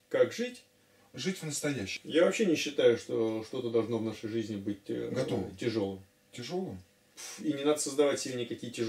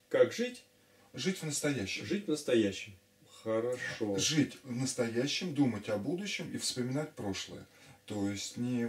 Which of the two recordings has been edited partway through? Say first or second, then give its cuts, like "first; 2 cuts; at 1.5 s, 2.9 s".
first; 1 cut; at 1.9 s